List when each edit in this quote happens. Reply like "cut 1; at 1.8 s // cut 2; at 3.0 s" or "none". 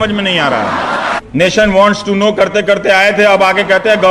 cut 1; at 1.1 s